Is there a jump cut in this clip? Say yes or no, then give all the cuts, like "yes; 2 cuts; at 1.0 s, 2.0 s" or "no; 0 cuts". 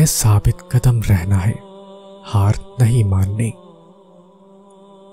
no; 0 cuts